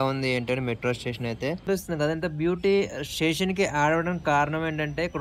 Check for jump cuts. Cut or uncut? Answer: cut